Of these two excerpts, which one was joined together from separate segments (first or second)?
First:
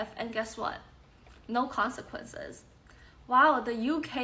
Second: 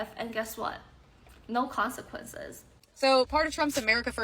second